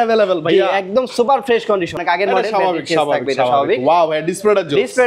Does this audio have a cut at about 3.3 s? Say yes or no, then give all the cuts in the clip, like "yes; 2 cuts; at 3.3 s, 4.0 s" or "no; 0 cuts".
no; 1 cut; at 2.0 s